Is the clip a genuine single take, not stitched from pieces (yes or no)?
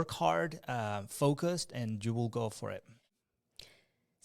no